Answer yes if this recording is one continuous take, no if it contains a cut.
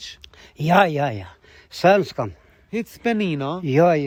yes